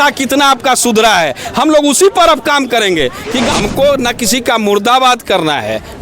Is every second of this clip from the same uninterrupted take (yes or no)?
no